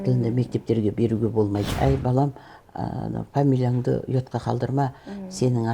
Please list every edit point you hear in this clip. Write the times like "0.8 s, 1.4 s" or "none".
1.7 s